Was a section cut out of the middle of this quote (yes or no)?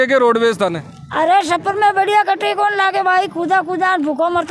no